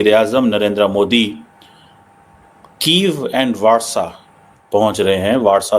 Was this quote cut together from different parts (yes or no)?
no